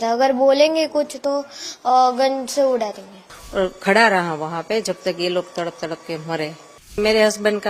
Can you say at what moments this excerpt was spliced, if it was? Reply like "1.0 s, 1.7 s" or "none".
3.4 s, 7.0 s